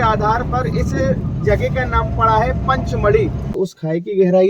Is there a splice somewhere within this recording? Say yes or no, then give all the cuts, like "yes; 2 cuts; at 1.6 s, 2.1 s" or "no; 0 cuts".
yes; 1 cut; at 3.5 s